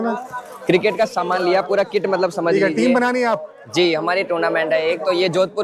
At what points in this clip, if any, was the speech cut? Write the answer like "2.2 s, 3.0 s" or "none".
none